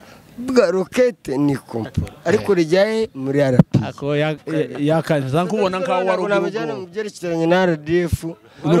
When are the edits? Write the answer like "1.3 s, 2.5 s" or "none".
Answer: none